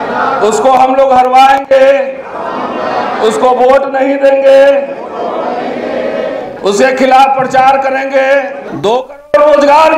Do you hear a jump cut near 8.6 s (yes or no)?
yes